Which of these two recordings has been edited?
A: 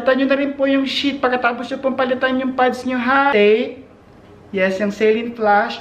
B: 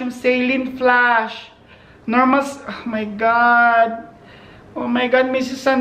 A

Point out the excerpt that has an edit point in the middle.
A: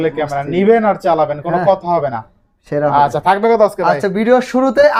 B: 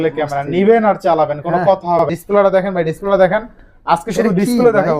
B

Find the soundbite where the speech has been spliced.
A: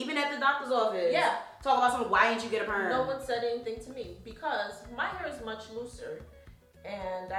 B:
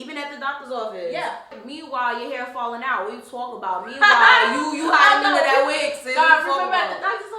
B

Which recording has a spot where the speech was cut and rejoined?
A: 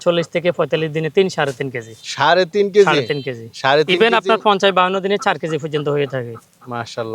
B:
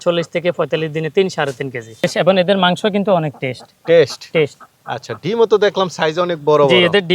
B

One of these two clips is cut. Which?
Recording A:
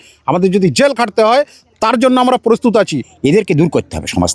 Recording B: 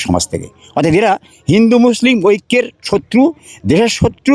A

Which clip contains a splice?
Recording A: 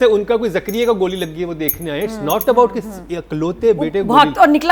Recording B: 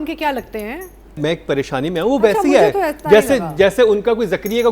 B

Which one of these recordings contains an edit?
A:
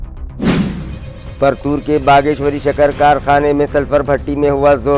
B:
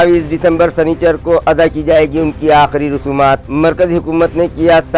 A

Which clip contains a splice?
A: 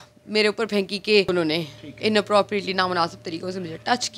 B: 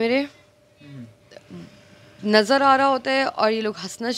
A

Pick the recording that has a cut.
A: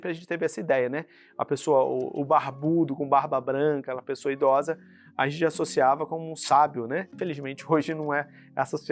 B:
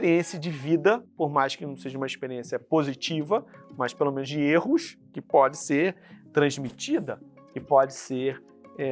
A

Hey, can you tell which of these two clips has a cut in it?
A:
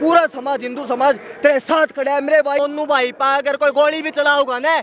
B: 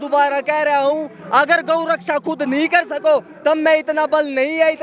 A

